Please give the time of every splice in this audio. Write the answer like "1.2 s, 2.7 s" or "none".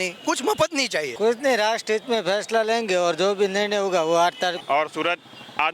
1.1 s, 4.6 s